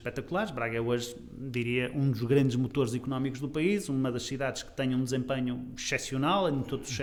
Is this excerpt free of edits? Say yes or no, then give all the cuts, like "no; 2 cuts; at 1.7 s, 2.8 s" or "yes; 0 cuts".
yes; 0 cuts